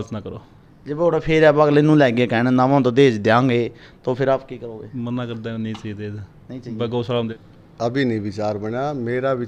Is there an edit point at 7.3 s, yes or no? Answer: yes